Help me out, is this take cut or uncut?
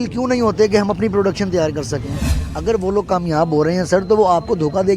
cut